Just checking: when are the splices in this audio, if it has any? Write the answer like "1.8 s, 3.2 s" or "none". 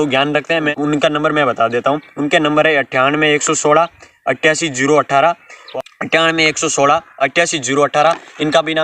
0.7 s, 5.5 s